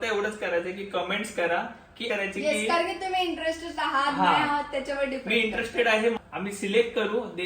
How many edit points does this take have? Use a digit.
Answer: 2